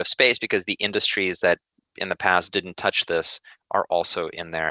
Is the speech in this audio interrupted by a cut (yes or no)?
no